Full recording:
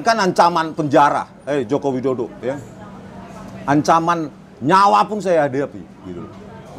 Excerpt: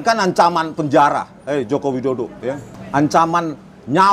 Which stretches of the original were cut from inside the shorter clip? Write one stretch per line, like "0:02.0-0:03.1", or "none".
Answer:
0:02.7-0:03.5